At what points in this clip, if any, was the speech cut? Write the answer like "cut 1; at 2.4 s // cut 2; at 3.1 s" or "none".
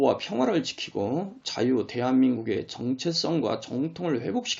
cut 1; at 2.6 s